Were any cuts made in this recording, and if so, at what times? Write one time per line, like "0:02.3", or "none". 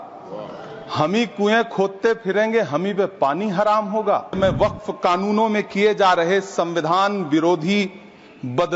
0:04.4